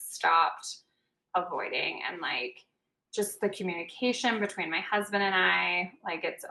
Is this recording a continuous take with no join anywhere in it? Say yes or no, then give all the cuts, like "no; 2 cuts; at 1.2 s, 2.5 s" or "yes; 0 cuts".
yes; 0 cuts